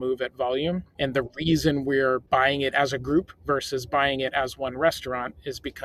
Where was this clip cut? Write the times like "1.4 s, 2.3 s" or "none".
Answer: none